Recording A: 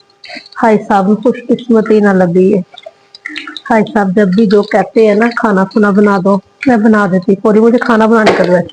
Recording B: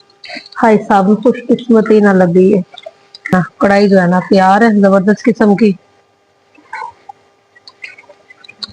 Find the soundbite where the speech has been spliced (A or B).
B